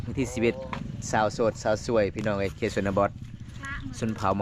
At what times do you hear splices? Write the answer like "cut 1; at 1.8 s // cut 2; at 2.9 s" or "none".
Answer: none